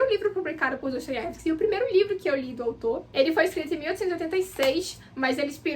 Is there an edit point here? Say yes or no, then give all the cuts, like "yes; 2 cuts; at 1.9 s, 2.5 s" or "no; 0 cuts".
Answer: yes; 1 cut; at 3.0 s